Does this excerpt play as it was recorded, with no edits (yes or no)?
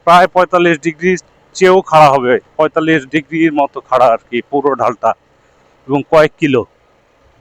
yes